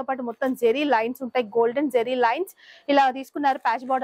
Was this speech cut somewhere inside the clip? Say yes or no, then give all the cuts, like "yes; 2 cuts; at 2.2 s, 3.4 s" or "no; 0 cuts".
no; 0 cuts